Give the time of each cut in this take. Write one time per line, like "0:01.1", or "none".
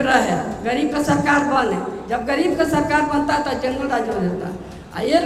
none